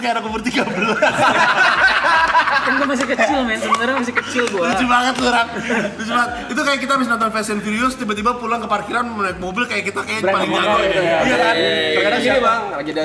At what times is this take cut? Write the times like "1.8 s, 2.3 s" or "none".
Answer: none